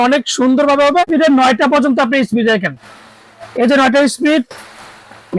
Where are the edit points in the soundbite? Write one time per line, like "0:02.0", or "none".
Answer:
0:01.1